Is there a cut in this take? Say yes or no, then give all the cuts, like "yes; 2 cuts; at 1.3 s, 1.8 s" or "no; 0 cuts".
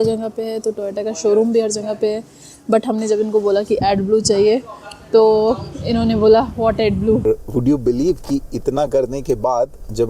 yes; 1 cut; at 7.2 s